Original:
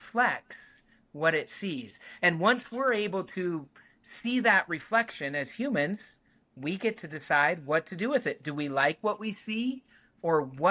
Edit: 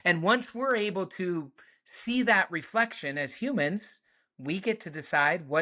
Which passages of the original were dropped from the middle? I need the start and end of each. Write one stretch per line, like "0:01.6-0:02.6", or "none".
none